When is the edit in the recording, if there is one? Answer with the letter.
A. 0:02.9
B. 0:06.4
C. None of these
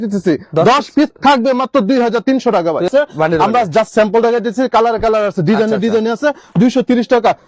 A